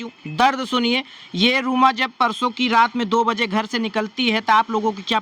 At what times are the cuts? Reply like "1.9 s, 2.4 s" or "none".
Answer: none

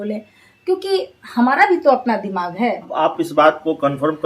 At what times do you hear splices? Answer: 2.9 s

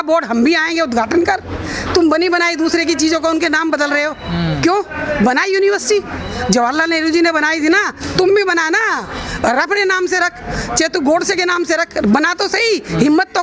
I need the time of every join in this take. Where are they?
none

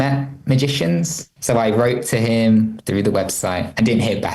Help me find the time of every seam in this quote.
1.2 s

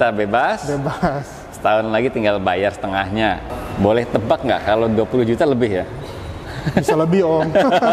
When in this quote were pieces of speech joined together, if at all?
3.5 s

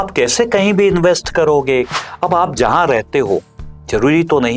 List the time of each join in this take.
1.9 s

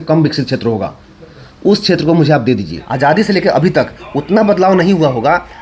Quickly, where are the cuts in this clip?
2.8 s

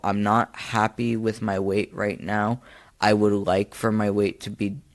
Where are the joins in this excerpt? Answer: none

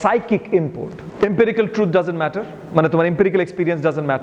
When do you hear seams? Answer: 1.0 s

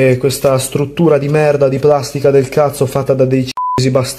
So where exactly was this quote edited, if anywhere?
none

